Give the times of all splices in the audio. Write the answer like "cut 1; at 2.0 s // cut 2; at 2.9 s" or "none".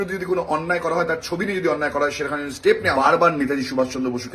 cut 1; at 2.9 s